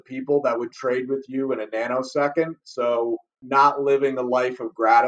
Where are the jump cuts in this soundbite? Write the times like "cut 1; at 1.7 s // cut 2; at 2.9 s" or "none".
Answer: cut 1; at 3.4 s